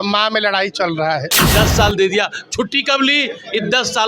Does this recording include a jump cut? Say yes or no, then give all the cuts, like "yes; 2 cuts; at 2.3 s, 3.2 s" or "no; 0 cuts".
yes; 1 cut; at 1.4 s